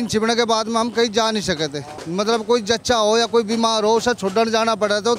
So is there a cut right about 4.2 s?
no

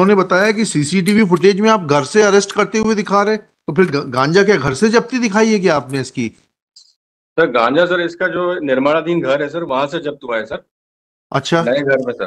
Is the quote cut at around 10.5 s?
no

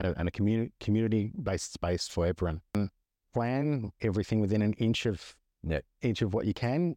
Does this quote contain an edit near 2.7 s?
yes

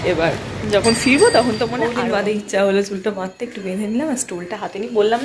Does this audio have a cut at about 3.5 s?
no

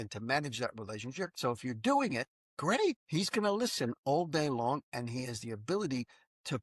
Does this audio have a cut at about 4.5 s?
no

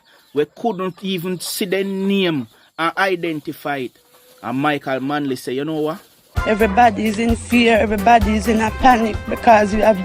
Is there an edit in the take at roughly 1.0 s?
no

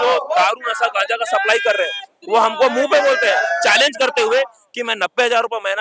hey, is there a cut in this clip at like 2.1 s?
no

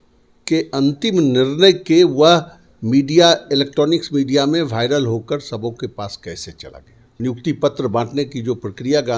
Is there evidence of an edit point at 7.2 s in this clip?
yes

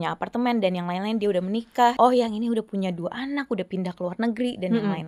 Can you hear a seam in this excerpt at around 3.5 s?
no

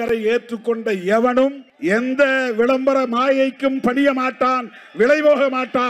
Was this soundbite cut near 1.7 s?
yes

